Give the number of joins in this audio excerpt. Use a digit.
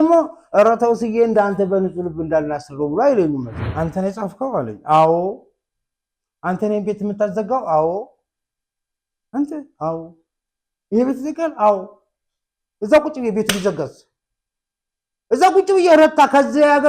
1